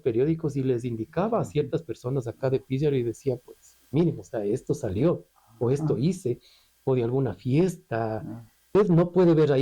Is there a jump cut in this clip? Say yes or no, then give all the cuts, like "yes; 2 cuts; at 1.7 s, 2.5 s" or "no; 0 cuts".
yes; 1 cut; at 8.7 s